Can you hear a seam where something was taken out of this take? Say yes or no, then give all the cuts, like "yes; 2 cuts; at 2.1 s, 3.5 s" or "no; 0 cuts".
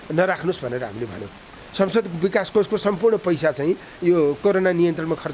no; 0 cuts